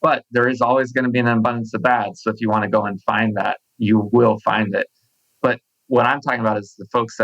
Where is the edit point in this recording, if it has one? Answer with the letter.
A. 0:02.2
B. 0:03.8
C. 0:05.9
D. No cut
D